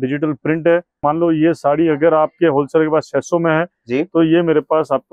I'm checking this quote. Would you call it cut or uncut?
cut